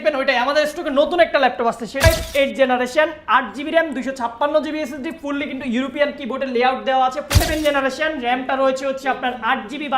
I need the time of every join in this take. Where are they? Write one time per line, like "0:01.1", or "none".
0:02.0
0:07.3